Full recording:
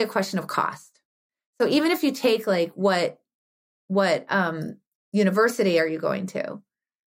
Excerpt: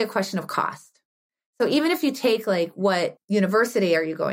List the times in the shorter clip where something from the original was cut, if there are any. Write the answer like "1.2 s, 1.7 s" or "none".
3.2 s